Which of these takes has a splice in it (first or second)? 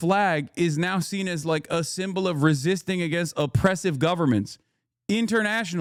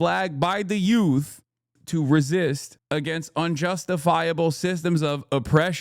second